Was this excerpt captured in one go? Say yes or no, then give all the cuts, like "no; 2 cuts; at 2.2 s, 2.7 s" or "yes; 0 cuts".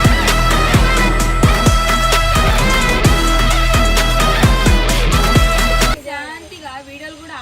no; 1 cut; at 6.0 s